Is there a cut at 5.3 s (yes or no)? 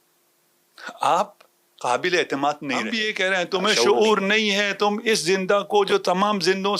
no